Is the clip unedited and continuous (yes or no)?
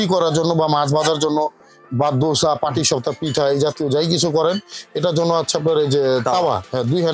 yes